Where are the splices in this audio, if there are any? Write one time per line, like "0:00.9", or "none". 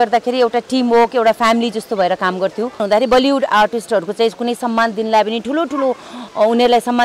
0:02.8